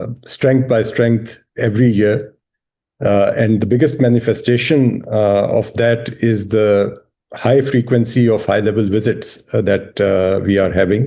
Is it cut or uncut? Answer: uncut